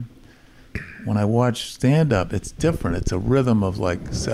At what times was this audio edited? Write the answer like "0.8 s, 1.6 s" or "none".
none